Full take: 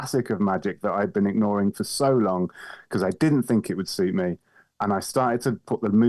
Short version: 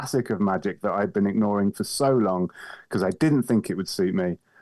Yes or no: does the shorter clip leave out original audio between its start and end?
no